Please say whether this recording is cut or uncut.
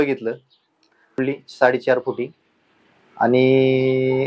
cut